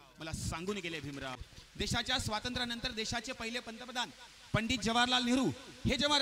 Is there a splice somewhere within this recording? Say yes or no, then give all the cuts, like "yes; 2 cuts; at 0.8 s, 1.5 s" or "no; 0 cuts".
yes; 1 cut; at 1.5 s